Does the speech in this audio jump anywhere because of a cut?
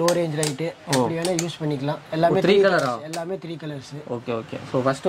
no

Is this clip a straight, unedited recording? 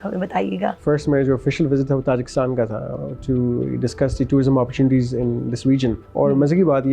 no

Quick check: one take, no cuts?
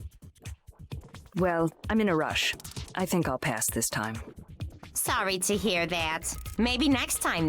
no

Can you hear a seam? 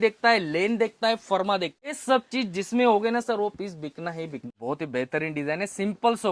yes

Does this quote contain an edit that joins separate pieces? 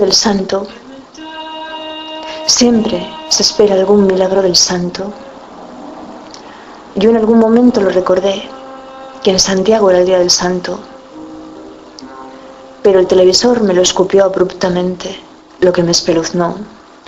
no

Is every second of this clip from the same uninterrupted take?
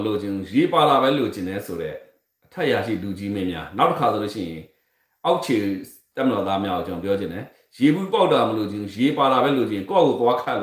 yes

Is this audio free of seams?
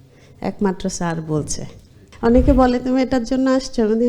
no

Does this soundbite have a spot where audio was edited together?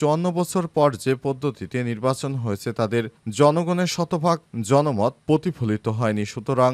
no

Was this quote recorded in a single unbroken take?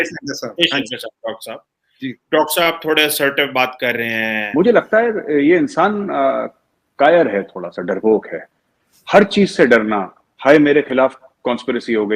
no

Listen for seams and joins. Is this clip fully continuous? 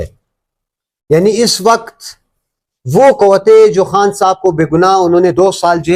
yes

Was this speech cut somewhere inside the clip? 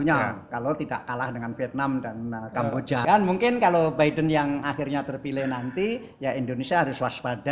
yes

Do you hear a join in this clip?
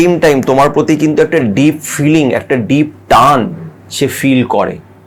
no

